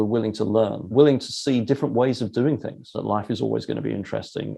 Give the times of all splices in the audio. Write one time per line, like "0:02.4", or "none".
0:00.8
0:03.0